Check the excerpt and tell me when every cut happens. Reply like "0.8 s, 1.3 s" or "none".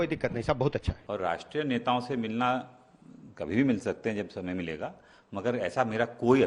1.0 s